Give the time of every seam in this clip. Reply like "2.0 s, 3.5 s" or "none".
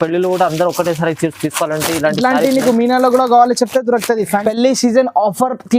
4.4 s

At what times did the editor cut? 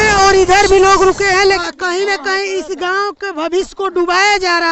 1.4 s

